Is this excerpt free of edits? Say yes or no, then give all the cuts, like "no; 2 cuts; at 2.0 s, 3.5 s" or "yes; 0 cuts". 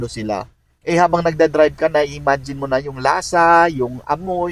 yes; 0 cuts